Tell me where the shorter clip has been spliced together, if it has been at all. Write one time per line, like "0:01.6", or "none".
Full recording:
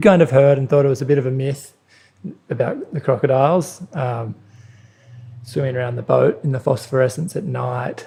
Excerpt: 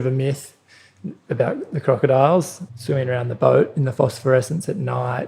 0:02.6